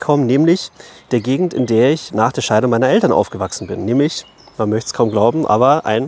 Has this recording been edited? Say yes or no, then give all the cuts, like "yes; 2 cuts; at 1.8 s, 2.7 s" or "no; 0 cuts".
no; 0 cuts